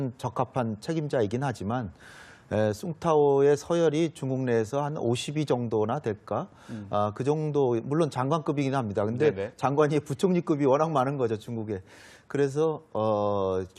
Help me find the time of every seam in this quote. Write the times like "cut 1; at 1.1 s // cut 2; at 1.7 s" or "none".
cut 1; at 12.7 s